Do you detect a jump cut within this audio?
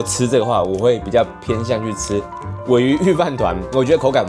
no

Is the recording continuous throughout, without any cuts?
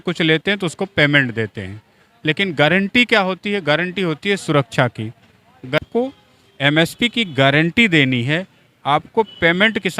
no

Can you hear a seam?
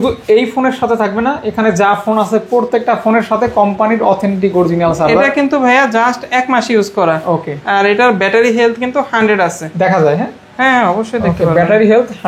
no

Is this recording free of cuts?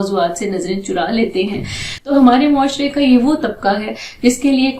no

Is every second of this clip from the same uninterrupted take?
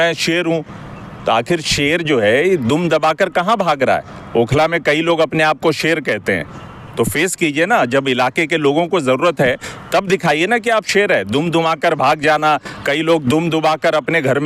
yes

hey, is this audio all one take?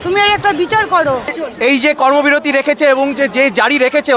no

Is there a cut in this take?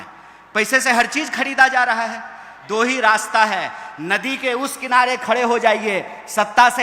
yes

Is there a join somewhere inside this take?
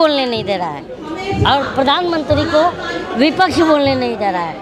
no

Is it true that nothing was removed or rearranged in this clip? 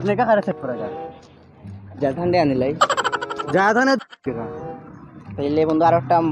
no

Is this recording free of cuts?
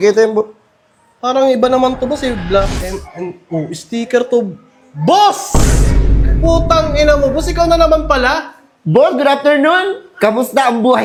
yes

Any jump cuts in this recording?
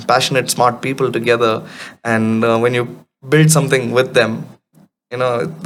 no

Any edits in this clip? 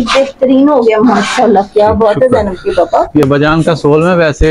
yes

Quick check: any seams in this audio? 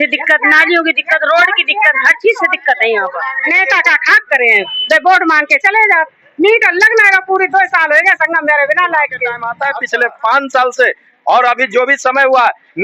yes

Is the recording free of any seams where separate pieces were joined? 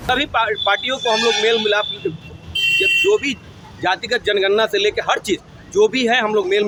yes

